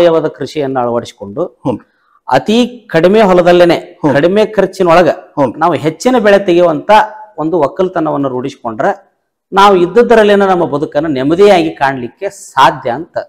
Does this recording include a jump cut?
no; 0 cuts

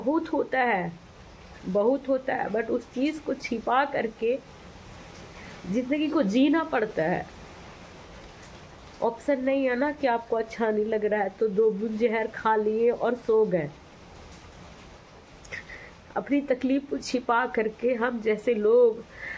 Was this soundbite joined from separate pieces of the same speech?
yes; 1 cut; at 15.0 s

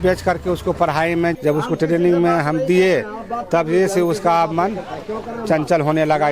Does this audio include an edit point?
yes; 1 cut; at 1.3 s

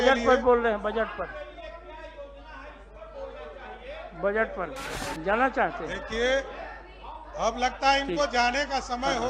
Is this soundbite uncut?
no; 1 cut; at 4.9 s

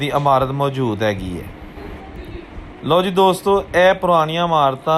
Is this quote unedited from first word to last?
yes; 0 cuts

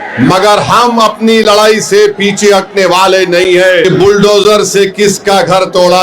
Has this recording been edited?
yes; 1 cut; at 3.9 s

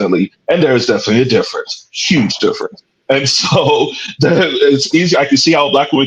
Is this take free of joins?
yes; 0 cuts

